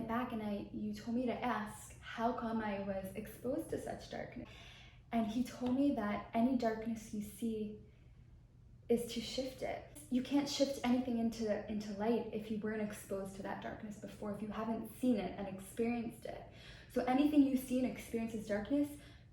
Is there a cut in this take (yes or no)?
yes